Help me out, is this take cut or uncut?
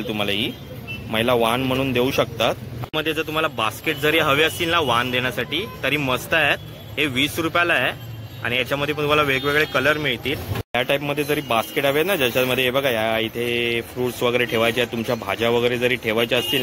cut